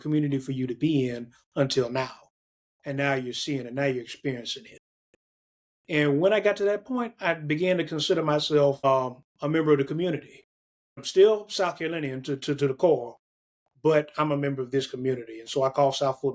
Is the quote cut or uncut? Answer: cut